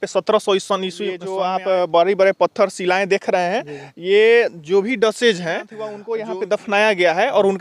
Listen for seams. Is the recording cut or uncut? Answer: cut